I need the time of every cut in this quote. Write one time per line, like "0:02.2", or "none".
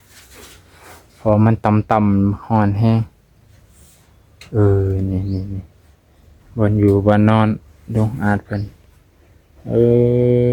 none